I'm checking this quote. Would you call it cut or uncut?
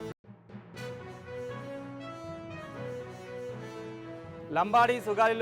uncut